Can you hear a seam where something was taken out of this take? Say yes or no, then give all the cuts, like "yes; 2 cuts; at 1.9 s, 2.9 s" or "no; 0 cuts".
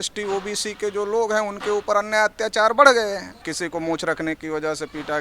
yes; 1 cut; at 3.5 s